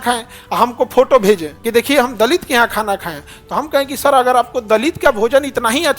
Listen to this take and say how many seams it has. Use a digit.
1